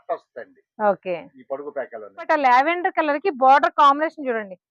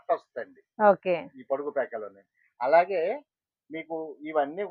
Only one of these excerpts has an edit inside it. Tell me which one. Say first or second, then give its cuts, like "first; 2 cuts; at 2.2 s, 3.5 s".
first; 1 cut; at 2.3 s